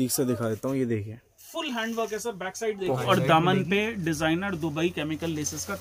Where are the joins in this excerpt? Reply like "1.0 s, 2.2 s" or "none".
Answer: 3.0 s